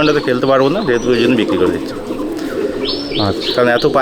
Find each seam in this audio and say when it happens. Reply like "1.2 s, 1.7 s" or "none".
none